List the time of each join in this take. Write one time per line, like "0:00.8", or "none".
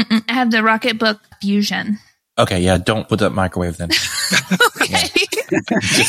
0:01.3
0:03.1